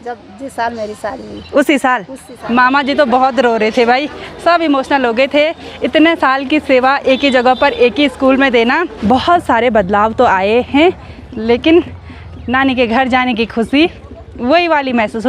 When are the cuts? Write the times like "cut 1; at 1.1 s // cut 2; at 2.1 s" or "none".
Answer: cut 1; at 2.3 s // cut 2; at 8.9 s